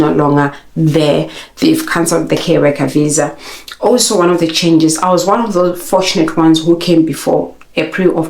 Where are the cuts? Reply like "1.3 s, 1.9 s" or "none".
none